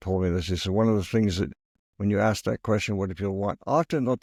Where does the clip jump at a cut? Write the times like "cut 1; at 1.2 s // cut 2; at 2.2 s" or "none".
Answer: none